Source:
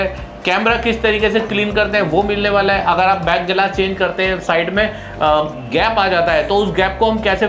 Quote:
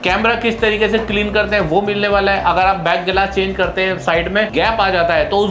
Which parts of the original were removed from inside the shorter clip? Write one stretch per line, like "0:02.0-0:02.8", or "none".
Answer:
0:04.9-0:05.7